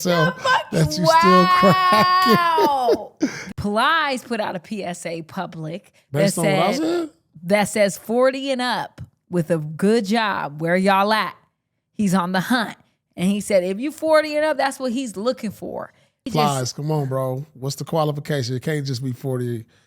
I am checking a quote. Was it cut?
yes; 2 cuts; at 3.4 s, 16.3 s

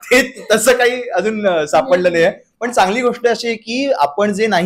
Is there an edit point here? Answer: no; 0 cuts

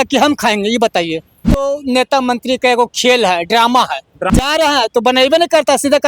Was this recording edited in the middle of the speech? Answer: yes; 2 cuts; at 1.6 s, 4.3 s

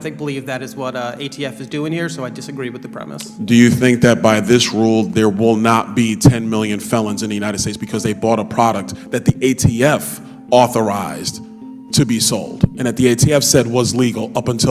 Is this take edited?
no; 0 cuts

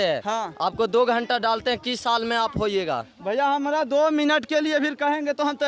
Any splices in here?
no; 0 cuts

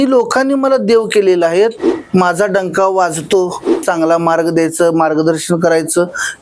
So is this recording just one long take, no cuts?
no; 2 cuts; at 1.8 s, 3.8 s

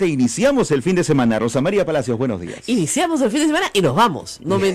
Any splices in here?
no; 0 cuts

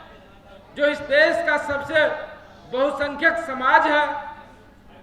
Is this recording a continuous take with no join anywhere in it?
yes; 0 cuts

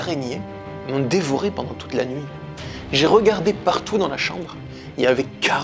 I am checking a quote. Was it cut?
no; 0 cuts

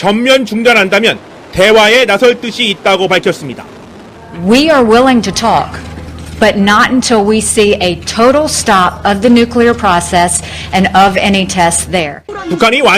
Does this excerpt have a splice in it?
yes; 1 cut; at 7.9 s

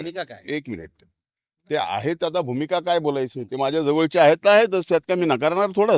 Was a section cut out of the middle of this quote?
no; 0 cuts

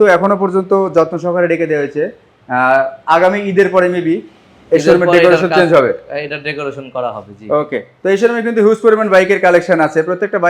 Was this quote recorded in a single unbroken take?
yes; 0 cuts

